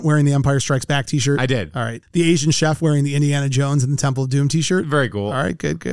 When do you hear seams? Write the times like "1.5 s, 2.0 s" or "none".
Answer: 2.0 s